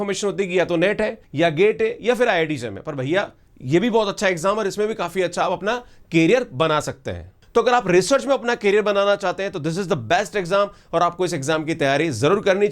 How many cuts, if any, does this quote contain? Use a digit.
1